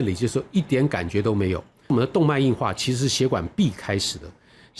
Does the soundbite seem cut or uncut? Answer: cut